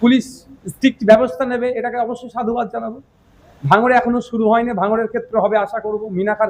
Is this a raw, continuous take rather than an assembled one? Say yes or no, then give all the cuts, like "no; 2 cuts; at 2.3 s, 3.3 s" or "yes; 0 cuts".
yes; 0 cuts